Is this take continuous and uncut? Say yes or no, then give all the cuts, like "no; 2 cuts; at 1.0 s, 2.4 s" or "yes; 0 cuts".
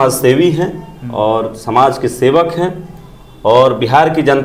yes; 0 cuts